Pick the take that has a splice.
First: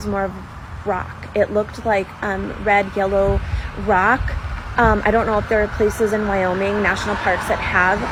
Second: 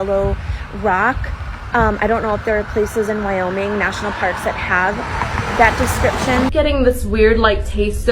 second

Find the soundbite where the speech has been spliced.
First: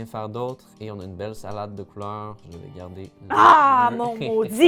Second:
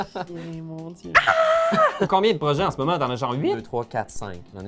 second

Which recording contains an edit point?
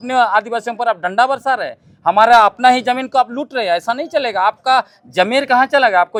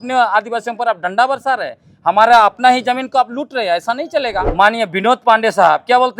second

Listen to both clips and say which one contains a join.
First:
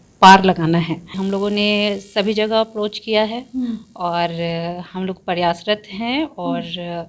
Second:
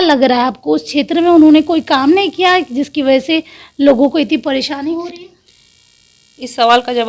first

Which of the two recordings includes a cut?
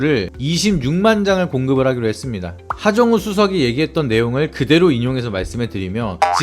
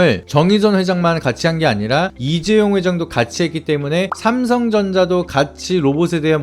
first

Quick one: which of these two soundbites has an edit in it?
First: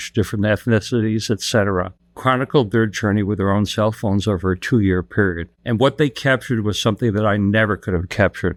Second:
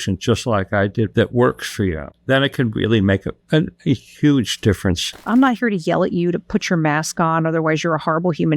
second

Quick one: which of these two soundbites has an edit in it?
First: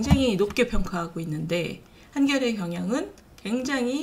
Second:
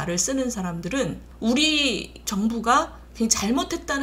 second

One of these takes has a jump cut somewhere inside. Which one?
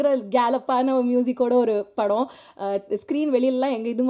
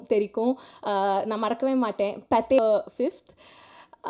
second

